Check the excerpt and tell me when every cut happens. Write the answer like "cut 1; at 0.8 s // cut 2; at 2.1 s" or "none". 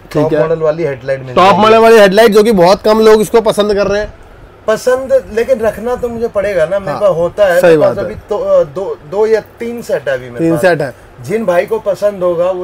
none